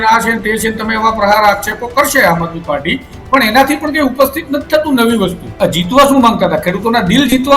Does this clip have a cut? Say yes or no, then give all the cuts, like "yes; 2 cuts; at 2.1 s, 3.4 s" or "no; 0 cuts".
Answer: yes; 1 cut; at 5.5 s